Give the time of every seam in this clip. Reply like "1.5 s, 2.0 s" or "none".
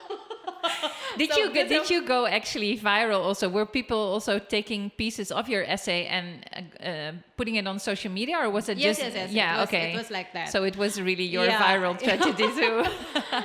none